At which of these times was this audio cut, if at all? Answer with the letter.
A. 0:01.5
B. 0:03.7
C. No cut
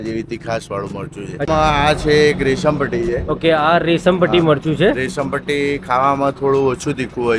A